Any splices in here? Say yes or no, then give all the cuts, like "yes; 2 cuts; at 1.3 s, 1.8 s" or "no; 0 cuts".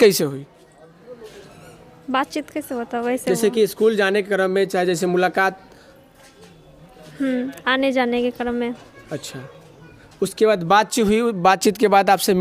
no; 0 cuts